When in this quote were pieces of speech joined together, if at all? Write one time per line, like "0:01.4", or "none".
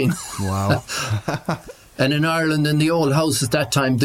0:01.4